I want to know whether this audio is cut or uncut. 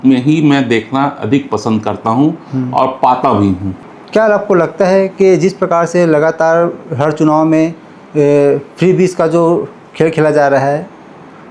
cut